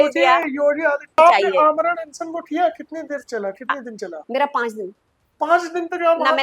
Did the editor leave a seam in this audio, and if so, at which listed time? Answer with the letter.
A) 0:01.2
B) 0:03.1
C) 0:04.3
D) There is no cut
A